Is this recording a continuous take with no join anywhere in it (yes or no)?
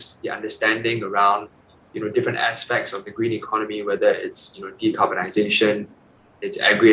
yes